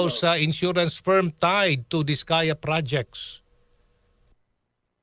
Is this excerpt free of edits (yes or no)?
yes